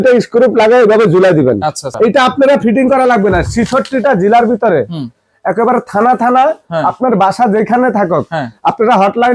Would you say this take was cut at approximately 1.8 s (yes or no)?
yes